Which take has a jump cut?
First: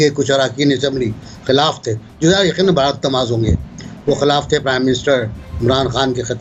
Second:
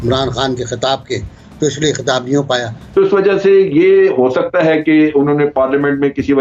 second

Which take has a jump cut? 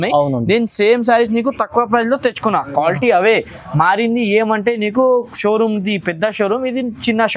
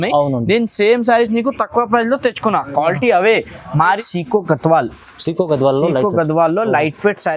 second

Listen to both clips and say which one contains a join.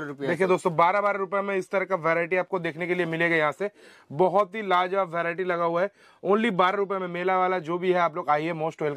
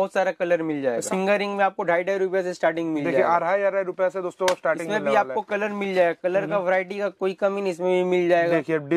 second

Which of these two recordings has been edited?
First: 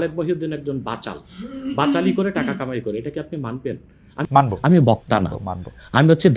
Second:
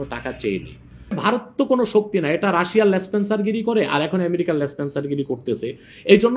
second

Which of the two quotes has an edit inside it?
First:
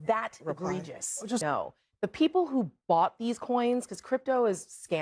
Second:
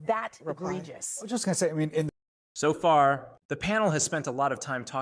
first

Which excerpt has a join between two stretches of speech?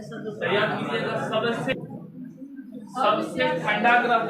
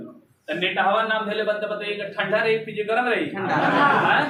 first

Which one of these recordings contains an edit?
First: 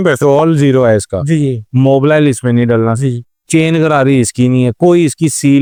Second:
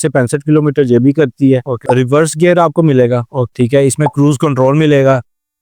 second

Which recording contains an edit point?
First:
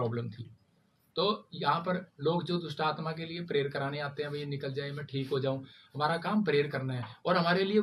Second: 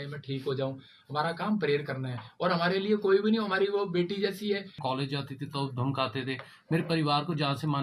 second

